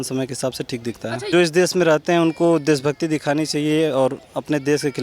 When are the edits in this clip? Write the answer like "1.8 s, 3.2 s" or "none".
1.3 s

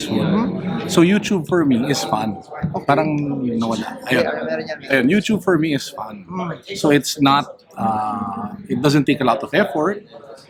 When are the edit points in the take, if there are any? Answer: none

